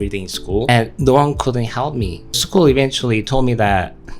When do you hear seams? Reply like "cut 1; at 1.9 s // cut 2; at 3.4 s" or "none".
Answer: cut 1; at 0.7 s // cut 2; at 2.4 s